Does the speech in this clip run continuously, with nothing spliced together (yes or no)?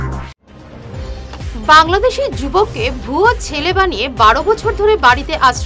yes